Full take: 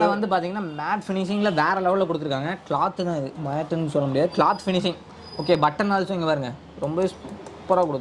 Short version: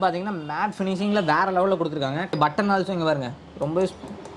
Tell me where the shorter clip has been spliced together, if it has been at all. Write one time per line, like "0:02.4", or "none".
0:02.4

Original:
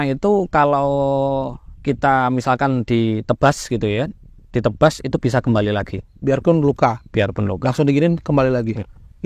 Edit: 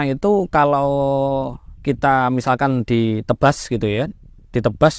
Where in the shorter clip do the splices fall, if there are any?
none

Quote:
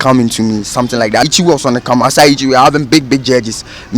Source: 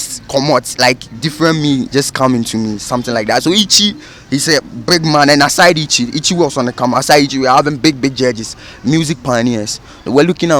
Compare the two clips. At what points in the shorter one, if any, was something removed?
0:01.3

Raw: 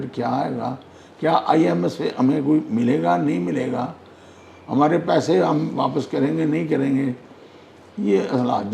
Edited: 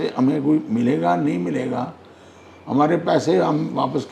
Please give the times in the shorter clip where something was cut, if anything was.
none

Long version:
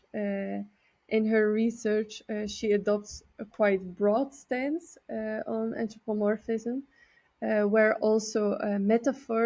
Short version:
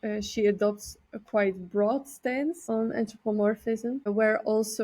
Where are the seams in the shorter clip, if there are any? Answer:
0:02.6
0:04.1

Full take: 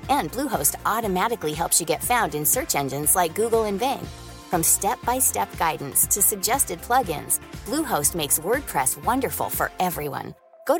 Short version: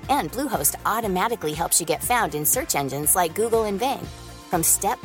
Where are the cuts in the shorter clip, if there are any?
none

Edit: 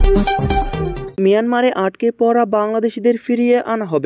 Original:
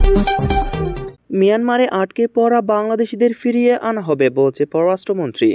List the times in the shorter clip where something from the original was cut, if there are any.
0:01.0

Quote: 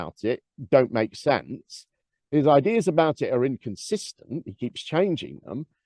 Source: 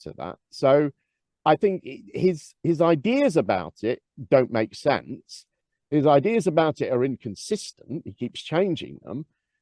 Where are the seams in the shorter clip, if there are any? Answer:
none

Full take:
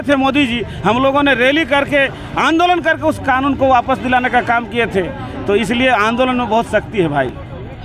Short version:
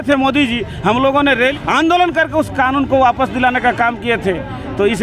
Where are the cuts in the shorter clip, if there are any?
0:01.5

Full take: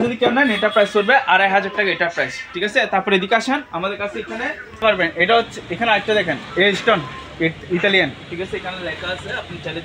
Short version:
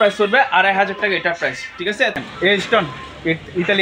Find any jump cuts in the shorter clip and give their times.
0:02.1

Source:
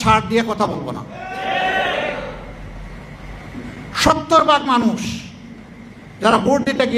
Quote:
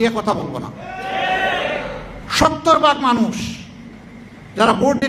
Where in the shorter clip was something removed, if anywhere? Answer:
0:02.2

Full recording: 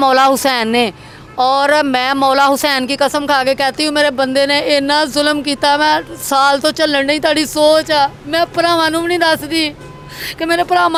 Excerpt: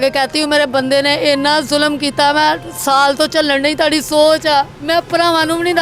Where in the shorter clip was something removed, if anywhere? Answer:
none

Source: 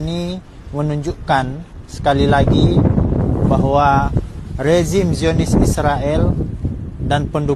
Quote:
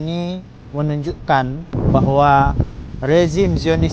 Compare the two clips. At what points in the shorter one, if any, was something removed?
0:01.8

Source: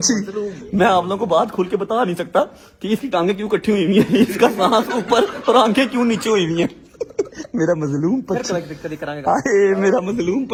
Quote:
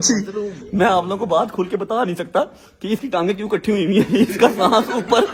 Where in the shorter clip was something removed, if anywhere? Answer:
none

